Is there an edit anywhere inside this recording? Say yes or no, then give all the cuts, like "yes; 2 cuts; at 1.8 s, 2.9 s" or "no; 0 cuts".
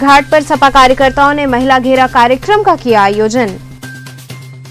no; 0 cuts